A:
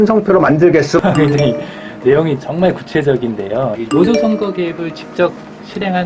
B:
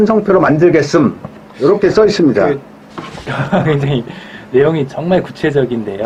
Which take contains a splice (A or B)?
A